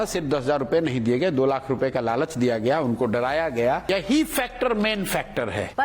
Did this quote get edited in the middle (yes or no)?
yes